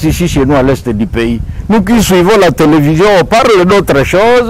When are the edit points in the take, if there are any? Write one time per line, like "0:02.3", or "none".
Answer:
none